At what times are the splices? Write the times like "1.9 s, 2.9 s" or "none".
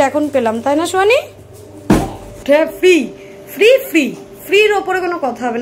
2.4 s